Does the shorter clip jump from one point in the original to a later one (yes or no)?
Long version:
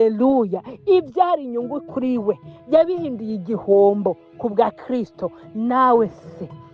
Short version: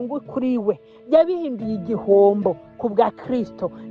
no